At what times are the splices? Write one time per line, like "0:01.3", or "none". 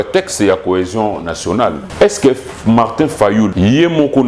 0:01.8
0:03.5